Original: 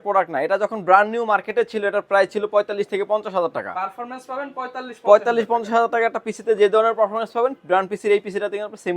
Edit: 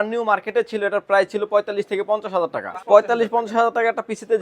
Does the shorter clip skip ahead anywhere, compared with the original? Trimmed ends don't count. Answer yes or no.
yes